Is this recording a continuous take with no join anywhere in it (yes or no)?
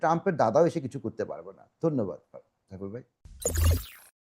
yes